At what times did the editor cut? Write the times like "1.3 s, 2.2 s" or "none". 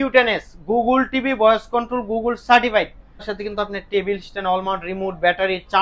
3.3 s

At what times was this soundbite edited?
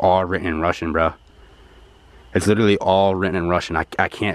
none

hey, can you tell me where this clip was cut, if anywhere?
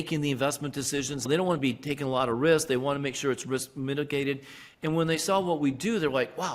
1.2 s

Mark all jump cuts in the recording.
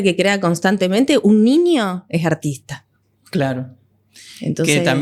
none

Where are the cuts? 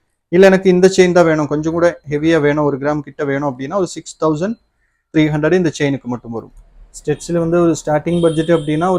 6.9 s

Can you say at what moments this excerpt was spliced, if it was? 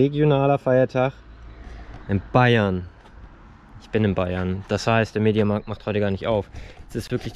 none

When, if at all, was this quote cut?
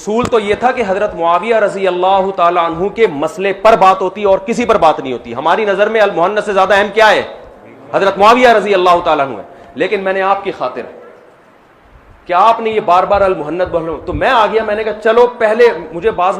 none

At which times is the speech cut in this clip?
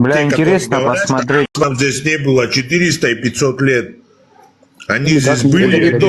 1.5 s

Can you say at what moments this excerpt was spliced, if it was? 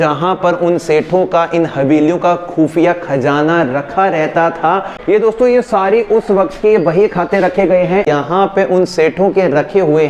5.1 s, 8.1 s

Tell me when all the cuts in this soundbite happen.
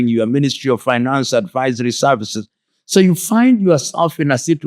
2.7 s

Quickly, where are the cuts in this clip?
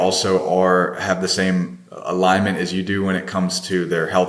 1.8 s

